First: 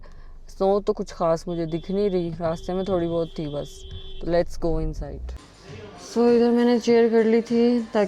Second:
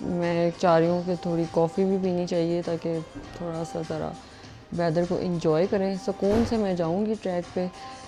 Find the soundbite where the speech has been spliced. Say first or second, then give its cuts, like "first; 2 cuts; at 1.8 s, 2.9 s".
first; 1 cut; at 5.4 s